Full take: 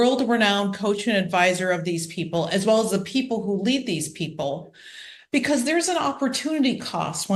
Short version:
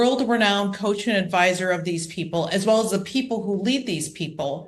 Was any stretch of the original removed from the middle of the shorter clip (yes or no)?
no